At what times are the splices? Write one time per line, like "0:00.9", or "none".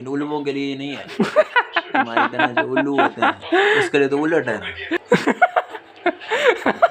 0:05.0